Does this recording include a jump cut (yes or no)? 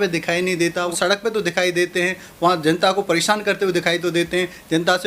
yes